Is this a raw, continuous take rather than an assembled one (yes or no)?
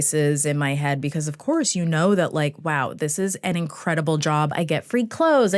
no